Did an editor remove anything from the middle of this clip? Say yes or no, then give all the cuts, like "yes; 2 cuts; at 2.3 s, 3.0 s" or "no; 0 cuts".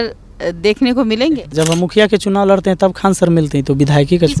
yes; 1 cut; at 1.5 s